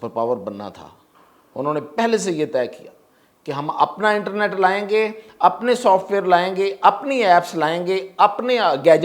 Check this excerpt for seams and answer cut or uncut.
uncut